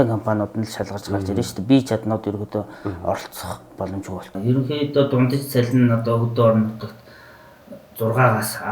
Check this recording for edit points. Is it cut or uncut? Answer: cut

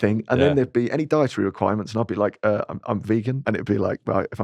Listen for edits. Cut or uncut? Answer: cut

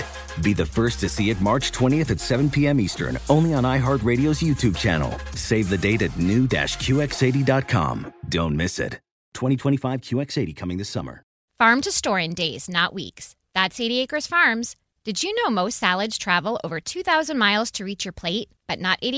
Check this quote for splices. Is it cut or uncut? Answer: cut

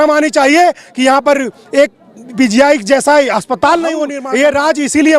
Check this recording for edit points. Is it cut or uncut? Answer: cut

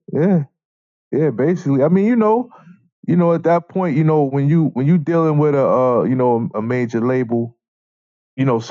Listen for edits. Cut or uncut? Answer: uncut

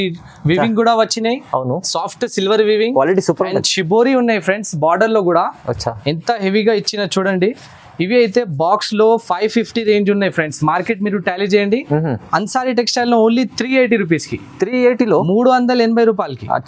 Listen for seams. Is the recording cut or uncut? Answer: uncut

